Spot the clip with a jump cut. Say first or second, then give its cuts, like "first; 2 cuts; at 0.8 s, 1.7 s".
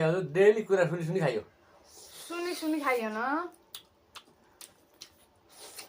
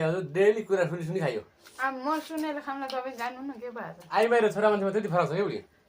second; 2 cuts; at 1.6 s, 4.0 s